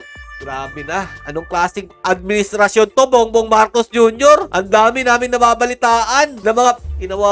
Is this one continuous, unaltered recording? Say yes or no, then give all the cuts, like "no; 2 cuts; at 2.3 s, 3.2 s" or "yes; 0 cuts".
yes; 0 cuts